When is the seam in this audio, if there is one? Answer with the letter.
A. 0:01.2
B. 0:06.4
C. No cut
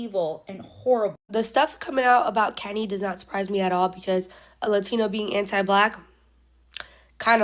A